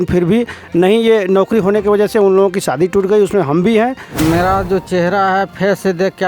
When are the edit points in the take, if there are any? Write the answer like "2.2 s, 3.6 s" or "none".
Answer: 4.1 s